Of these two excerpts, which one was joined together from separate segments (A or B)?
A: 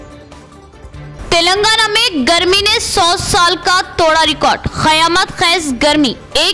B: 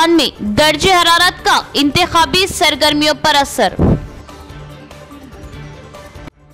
A